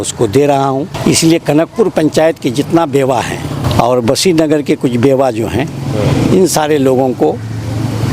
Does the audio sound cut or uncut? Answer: cut